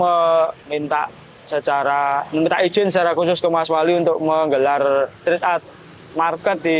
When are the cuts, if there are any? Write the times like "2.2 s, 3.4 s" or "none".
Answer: none